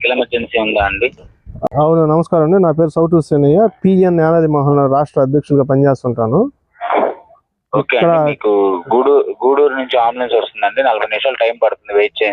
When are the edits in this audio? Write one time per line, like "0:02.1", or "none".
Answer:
0:01.6